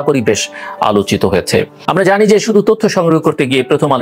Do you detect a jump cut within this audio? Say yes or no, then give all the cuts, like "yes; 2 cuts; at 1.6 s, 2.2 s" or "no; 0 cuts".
yes; 1 cut; at 1.8 s